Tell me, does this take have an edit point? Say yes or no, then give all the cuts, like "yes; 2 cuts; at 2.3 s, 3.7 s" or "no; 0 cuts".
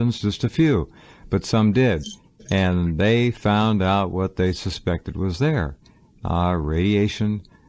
yes; 1 cut; at 4.6 s